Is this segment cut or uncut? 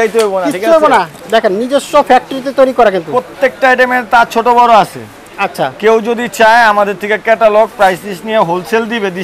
cut